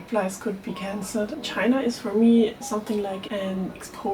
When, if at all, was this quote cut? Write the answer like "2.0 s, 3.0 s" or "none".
1.3 s